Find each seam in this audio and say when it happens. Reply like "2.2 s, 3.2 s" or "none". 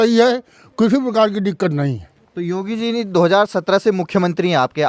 none